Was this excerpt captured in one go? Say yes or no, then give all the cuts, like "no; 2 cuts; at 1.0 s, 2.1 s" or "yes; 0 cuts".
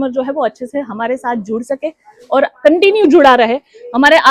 yes; 0 cuts